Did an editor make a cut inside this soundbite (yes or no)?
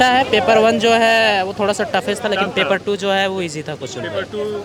no